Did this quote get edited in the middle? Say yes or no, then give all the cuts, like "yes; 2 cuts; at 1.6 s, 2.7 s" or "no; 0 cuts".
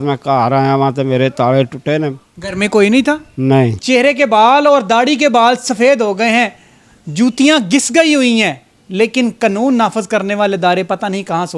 yes; 1 cut; at 3.8 s